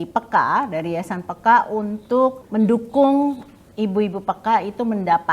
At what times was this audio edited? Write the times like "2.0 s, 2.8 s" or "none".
2.4 s